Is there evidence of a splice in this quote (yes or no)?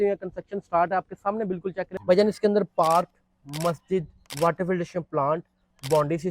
yes